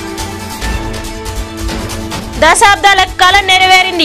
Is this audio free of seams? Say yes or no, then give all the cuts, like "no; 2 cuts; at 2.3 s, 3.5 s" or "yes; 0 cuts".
yes; 0 cuts